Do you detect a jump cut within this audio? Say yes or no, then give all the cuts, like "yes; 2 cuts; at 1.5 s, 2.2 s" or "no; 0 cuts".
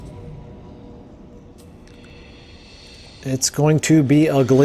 yes; 1 cut; at 3.2 s